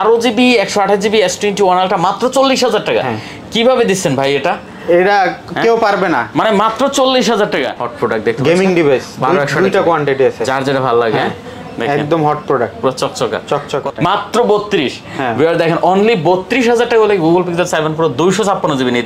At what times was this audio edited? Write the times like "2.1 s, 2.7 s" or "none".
7.8 s, 13.9 s